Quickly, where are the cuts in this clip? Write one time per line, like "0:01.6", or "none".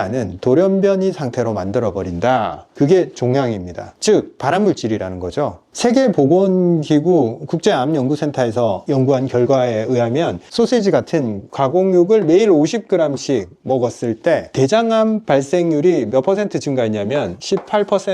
0:02.7
0:14.5

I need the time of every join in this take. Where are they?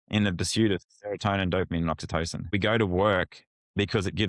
0:02.5

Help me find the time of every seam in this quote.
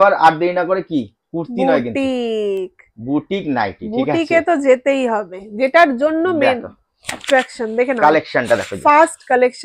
none

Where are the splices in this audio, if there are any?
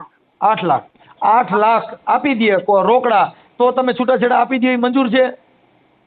none

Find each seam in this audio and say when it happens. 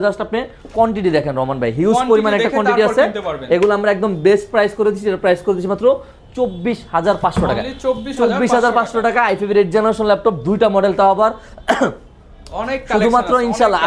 none

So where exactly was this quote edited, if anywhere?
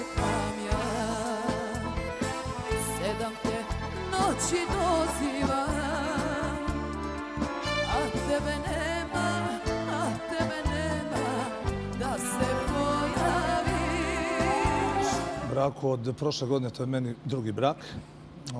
0:15.4

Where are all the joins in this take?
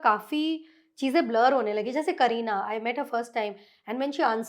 none

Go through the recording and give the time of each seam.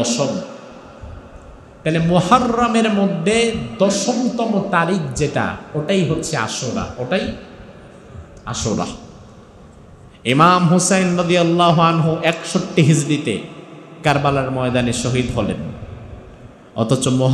none

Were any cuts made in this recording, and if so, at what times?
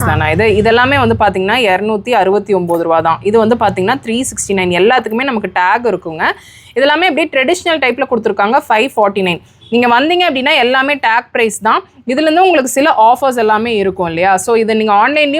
none

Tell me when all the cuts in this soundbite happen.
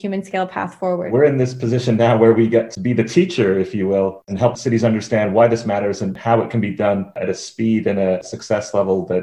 0:01.1
0:02.7
0:04.6
0:06.2
0:07.2
0:08.2

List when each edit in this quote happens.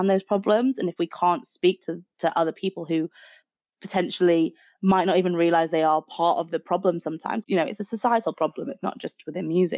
0:07.4

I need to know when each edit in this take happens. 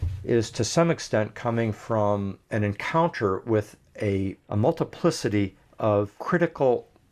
0:02.4
0:04.4
0:06.2

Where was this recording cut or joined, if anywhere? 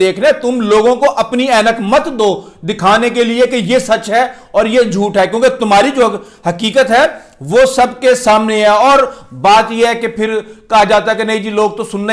none

